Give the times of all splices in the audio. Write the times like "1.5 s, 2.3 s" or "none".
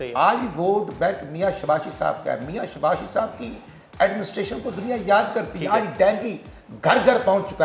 none